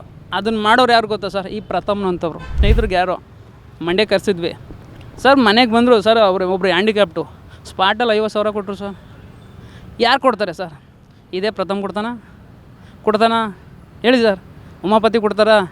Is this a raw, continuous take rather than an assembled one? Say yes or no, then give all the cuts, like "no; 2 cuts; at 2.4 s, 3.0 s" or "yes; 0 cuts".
no; 1 cut; at 2.6 s